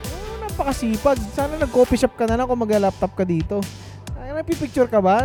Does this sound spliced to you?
no; 0 cuts

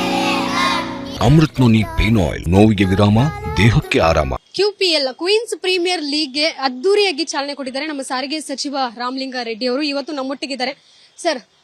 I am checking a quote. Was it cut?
yes; 3 cuts; at 1.1 s, 2.4 s, 4.4 s

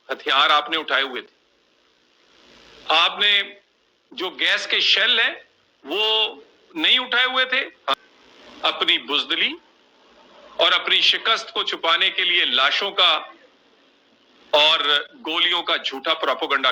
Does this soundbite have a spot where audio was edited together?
yes; 1 cut; at 7.9 s

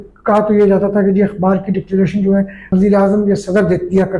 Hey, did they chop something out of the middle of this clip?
yes; 1 cut; at 2.6 s

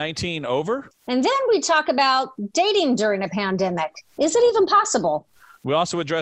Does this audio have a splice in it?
yes; 1 cut; at 0.9 s

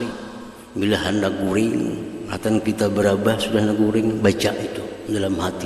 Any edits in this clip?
no; 0 cuts

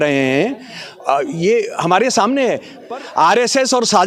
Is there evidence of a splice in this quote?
yes; 1 cut; at 2.7 s

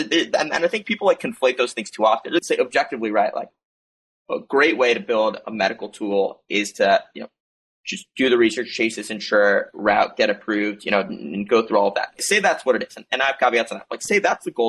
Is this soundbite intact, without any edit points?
no; 2 cuts; at 2.4 s, 12.2 s

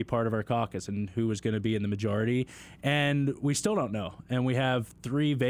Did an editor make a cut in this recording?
no; 0 cuts

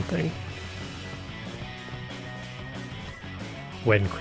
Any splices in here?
yes; 1 cut; at 2.6 s

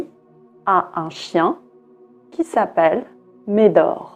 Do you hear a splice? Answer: no; 0 cuts

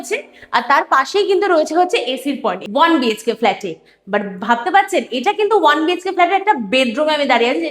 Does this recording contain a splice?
yes; 1 cut; at 2.6 s

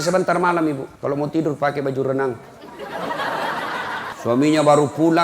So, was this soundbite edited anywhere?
yes; 2 cuts; at 0.9 s, 4.1 s

